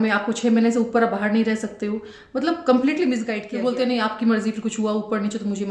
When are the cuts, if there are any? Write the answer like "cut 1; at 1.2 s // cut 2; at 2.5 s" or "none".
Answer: cut 1; at 3.4 s